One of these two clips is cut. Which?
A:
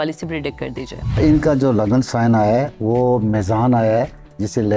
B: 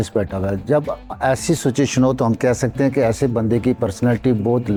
A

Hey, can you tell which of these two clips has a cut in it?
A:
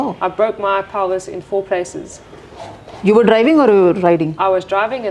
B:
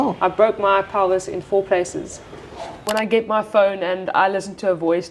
B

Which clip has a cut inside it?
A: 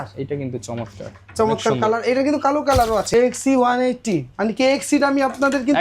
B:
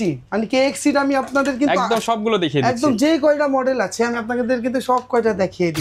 A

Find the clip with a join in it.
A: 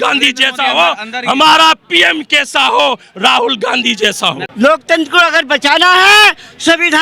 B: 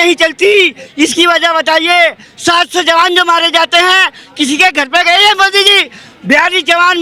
A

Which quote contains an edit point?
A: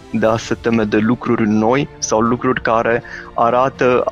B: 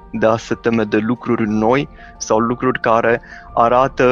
A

